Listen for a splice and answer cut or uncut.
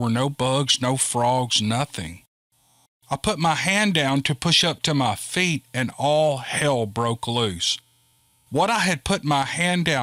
uncut